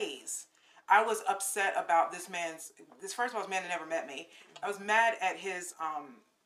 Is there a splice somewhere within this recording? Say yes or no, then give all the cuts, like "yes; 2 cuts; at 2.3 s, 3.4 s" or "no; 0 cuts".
no; 0 cuts